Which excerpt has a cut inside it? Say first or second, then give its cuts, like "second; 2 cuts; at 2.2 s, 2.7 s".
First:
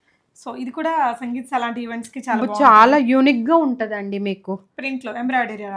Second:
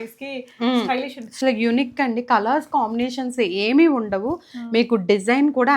second; 1 cut; at 1.3 s